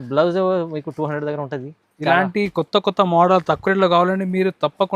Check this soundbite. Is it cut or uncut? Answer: uncut